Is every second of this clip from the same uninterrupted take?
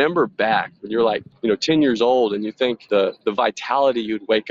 no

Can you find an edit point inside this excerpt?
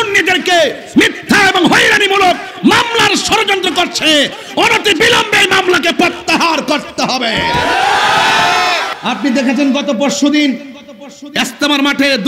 yes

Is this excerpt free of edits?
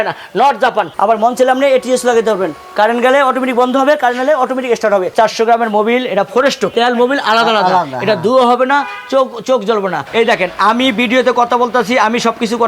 no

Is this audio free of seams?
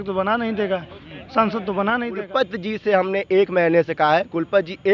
no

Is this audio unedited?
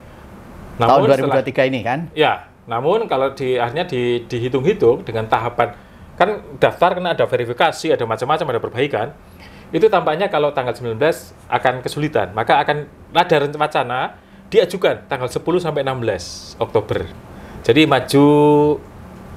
yes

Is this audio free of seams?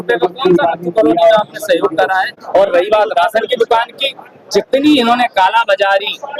no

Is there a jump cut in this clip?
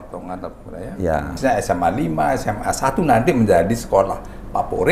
yes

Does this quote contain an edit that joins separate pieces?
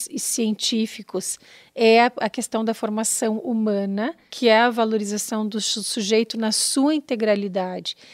yes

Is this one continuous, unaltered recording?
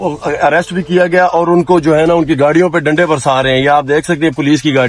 yes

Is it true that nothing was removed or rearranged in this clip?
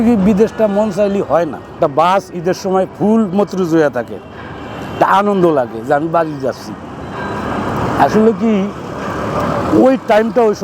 no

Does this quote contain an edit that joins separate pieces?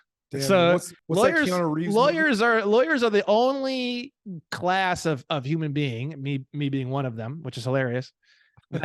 yes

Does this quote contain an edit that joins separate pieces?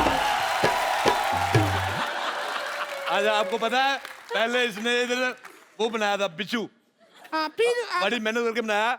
yes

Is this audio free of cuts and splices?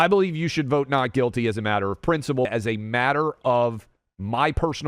no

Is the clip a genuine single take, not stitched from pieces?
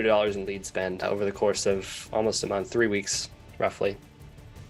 no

